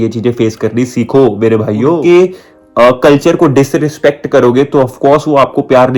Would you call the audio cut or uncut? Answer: cut